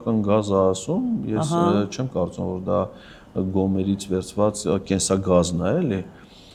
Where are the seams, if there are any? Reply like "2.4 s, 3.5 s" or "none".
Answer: none